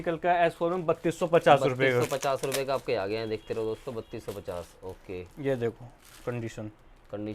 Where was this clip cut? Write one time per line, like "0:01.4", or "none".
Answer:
none